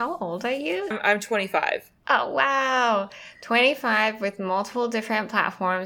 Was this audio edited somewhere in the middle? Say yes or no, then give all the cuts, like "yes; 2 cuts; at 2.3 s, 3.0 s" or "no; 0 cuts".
yes; 1 cut; at 0.9 s